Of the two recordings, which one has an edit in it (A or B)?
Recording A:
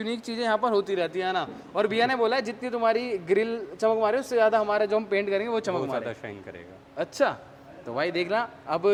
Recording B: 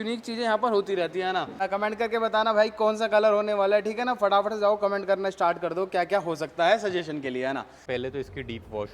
B